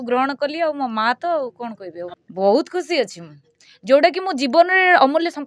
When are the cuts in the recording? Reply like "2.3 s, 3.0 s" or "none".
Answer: 2.1 s